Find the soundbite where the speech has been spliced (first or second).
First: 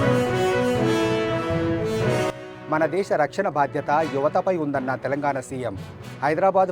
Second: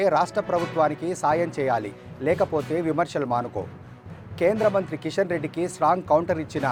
first